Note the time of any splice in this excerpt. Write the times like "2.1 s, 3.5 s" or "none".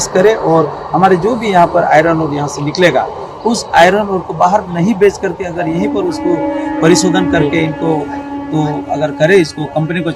none